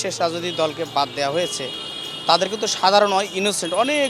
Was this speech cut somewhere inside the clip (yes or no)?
no